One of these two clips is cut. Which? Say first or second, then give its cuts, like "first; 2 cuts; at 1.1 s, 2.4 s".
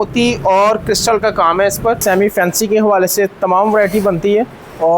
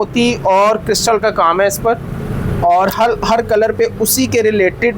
first; 1 cut; at 2.0 s